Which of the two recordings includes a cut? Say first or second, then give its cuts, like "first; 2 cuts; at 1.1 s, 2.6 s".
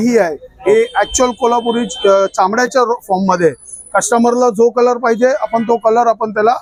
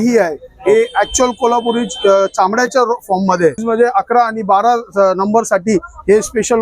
second; 1 cut; at 3.6 s